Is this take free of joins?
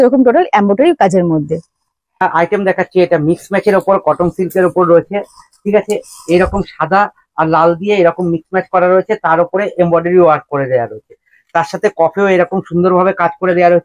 no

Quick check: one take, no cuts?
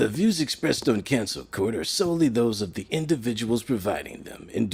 yes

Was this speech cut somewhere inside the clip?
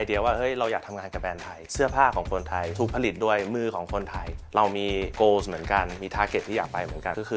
no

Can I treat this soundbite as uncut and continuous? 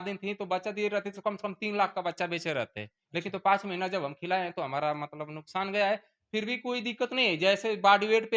yes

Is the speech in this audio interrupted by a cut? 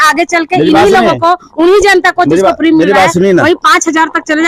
no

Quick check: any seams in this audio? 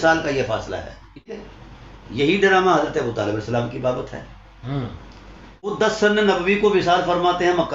yes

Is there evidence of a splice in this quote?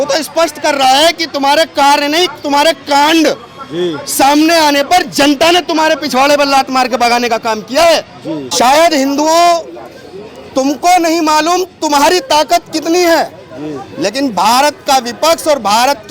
yes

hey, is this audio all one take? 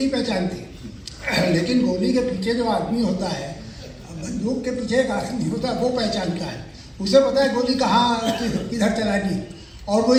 yes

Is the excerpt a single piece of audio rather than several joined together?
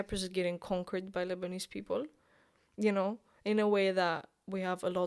yes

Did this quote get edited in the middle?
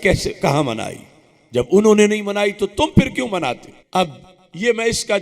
yes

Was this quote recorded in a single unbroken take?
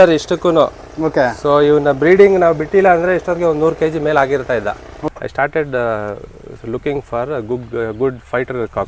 no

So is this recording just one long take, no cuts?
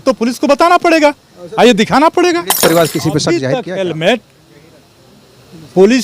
no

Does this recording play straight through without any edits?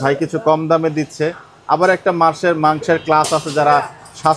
yes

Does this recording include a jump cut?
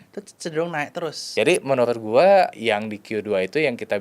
yes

